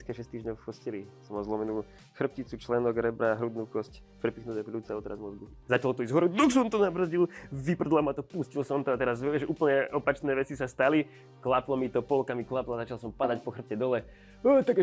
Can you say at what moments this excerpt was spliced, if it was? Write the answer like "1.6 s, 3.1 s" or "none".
5.5 s